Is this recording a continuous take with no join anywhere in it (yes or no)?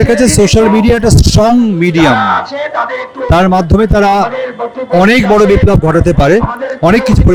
yes